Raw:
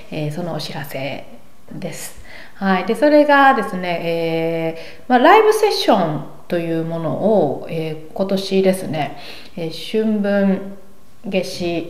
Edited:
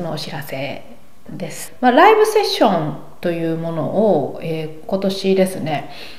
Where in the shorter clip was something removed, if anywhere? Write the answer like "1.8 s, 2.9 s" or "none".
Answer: 1.6 s